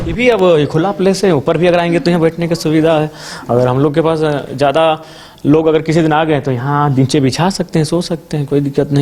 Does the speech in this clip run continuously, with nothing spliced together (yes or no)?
yes